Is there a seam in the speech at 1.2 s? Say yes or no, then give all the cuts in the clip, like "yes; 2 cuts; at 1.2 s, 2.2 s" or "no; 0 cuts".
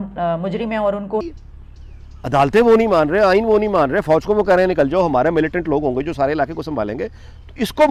yes; 1 cut; at 1.2 s